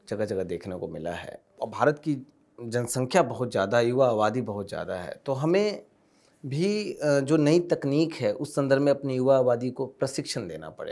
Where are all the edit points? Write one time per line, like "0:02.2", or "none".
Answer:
0:01.6